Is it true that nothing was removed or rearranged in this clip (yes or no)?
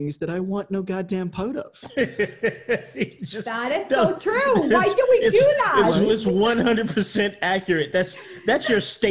yes